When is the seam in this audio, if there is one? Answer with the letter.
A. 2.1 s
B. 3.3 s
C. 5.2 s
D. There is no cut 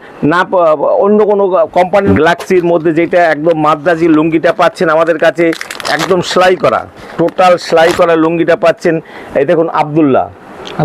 A